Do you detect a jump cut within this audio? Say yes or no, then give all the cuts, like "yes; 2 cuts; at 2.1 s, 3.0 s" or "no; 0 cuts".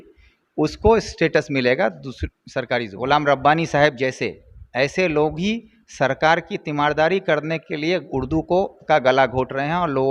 yes; 1 cut; at 2.9 s